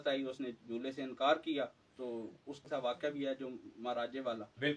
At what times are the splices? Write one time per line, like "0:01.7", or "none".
0:02.7